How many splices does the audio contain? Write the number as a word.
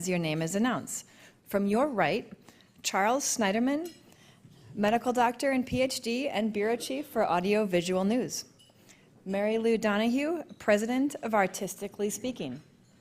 one